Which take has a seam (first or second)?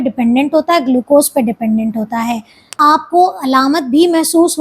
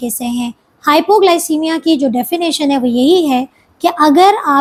first